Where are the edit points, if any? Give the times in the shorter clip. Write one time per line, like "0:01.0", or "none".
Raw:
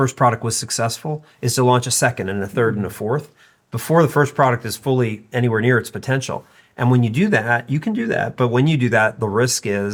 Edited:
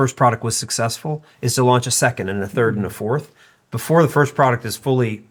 none

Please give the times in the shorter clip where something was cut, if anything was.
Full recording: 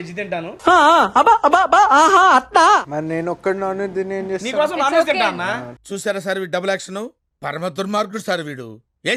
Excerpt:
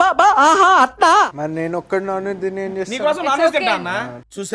none

